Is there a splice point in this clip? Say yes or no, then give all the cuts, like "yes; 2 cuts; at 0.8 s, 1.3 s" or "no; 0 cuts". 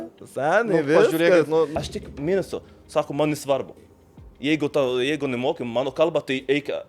yes; 1 cut; at 1.7 s